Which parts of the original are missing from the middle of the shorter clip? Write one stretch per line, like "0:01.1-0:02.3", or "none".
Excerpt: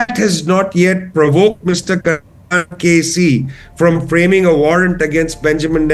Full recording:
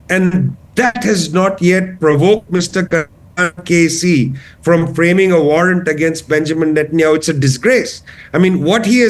none